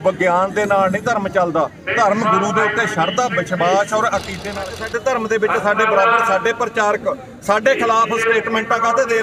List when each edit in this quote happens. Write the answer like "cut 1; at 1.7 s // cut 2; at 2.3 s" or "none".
cut 1; at 4.6 s